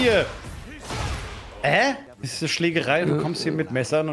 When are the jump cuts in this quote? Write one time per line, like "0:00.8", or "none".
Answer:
0:02.1